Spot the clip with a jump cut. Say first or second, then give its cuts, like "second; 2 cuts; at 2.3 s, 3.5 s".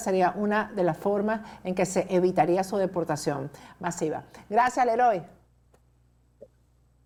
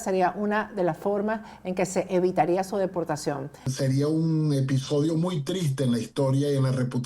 second; 1 cut; at 3.7 s